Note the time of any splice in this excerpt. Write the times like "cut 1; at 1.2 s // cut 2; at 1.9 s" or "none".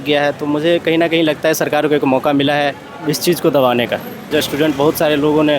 cut 1; at 4.3 s